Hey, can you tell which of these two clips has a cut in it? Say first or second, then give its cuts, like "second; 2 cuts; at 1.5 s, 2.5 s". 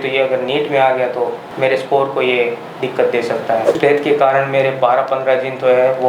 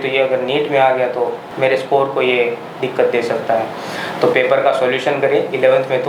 first; 1 cut; at 3.8 s